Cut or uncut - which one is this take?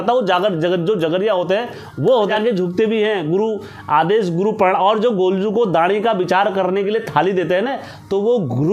cut